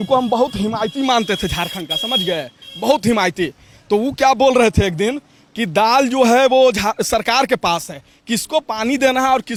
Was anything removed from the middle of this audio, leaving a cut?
no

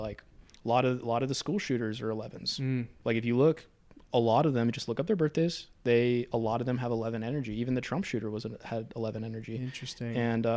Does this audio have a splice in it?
no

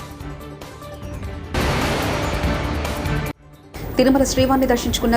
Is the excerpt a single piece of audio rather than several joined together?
no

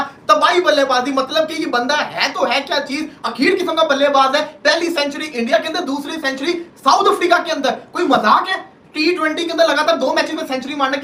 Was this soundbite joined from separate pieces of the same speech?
no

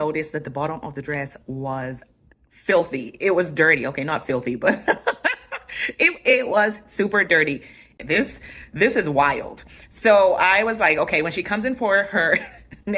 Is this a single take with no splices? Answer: no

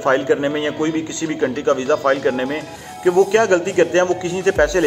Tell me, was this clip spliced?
no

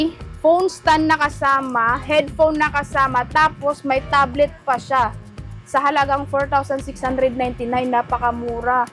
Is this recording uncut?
yes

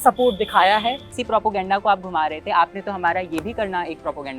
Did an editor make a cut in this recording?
yes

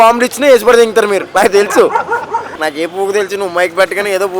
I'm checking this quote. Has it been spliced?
yes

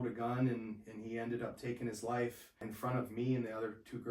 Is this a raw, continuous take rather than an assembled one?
no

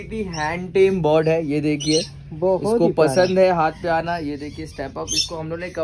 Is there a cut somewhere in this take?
no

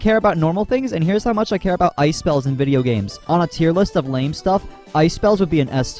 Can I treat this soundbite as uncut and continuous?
yes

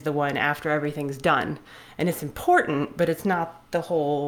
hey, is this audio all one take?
yes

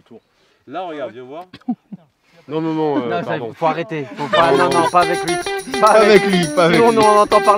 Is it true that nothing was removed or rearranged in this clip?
yes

